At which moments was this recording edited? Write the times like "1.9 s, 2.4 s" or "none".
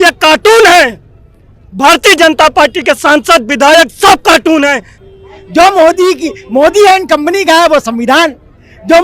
4.9 s

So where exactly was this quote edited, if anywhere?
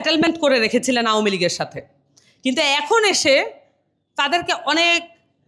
none

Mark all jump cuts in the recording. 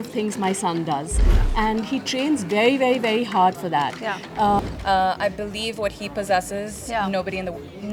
4.6 s

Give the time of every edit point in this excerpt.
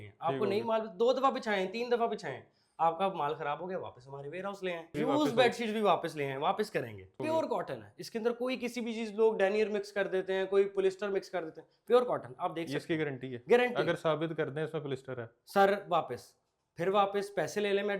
4.9 s, 7.2 s

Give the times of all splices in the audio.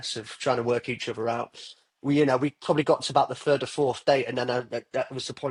none

